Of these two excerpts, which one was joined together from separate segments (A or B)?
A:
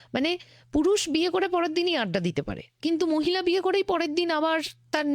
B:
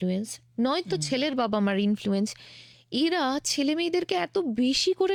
A